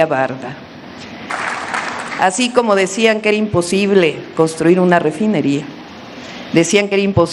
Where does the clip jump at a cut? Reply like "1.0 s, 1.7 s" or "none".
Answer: 1.3 s